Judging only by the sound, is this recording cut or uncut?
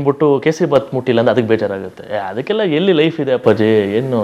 uncut